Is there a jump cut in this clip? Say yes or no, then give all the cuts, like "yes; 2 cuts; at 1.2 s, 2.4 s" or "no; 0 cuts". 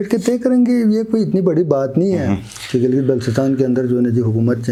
no; 0 cuts